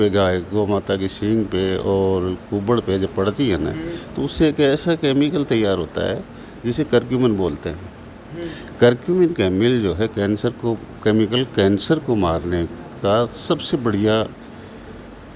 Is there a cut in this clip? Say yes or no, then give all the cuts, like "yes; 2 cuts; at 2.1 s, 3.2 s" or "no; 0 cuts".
no; 0 cuts